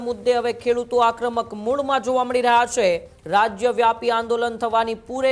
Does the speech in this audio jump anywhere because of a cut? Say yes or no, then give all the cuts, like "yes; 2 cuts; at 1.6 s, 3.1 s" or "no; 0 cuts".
yes; 1 cut; at 3.1 s